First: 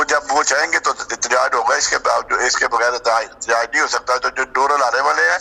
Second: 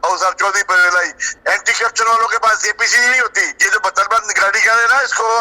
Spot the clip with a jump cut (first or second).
second